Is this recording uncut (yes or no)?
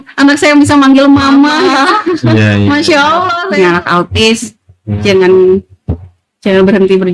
no